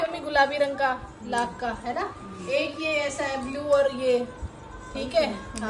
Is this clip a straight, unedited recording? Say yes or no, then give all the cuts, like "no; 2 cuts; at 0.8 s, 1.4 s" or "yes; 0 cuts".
yes; 0 cuts